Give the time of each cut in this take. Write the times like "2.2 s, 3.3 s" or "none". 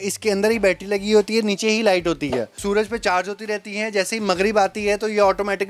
2.6 s